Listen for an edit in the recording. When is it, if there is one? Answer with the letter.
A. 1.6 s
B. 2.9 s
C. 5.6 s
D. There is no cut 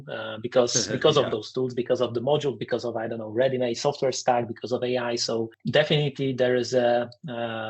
C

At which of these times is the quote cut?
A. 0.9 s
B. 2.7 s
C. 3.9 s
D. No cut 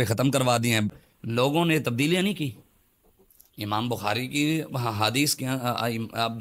A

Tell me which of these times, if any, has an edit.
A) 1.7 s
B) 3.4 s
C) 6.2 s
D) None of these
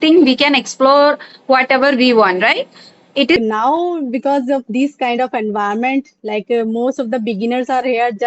B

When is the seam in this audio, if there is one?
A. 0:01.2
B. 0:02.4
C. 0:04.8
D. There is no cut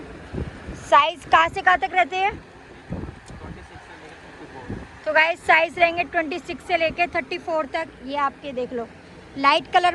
D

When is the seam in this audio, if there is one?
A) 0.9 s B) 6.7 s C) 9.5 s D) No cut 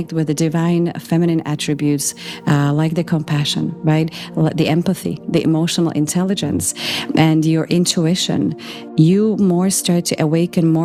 D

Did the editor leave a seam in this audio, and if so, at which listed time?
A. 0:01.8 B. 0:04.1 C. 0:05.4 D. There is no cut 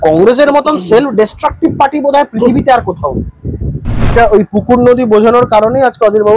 B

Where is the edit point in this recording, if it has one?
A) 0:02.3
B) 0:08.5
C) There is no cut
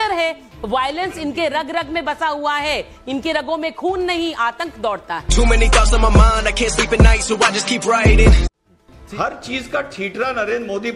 B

